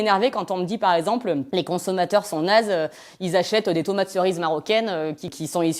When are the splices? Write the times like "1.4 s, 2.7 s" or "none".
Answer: 1.4 s